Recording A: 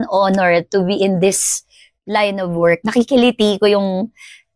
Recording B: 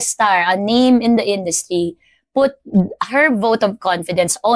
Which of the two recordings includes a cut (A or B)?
A